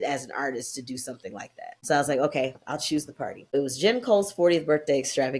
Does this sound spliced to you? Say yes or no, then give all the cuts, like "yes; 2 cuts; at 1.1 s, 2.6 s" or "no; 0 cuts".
yes; 2 cuts; at 1.8 s, 3.5 s